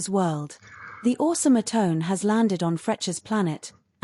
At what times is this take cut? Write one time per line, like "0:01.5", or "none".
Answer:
none